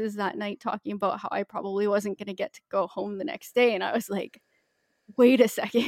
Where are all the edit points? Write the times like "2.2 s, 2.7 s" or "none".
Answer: none